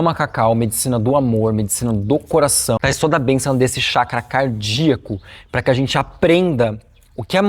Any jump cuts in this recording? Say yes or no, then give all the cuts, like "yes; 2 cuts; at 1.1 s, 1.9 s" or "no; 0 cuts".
yes; 1 cut; at 2.8 s